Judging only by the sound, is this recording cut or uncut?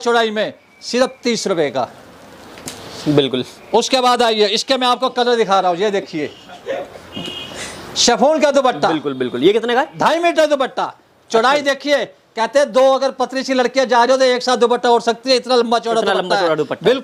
uncut